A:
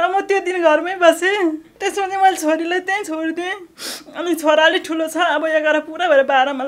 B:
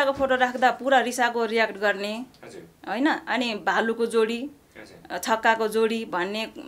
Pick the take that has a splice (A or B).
A